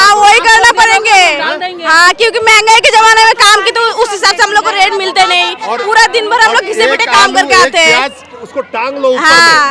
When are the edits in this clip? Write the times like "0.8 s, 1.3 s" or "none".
none